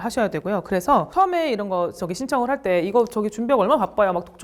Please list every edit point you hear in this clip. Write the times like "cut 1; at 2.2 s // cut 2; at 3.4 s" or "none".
none